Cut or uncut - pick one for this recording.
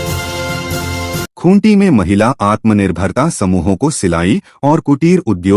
cut